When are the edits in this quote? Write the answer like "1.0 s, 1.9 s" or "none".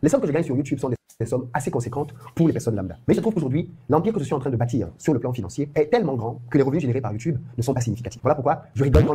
none